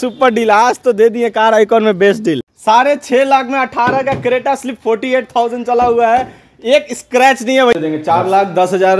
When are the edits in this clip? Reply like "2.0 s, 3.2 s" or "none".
2.5 s, 7.8 s